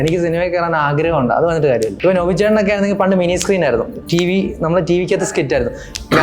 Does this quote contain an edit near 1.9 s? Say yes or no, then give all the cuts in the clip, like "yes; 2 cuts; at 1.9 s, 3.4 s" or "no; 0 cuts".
yes; 1 cut; at 1.9 s